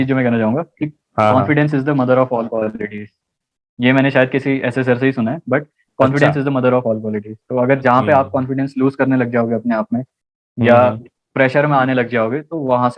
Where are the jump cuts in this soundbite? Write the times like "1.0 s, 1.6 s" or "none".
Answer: none